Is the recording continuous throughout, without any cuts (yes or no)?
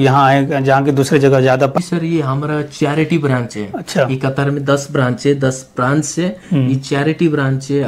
no